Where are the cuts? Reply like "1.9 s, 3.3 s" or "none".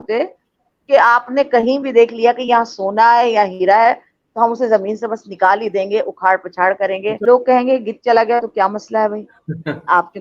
7.2 s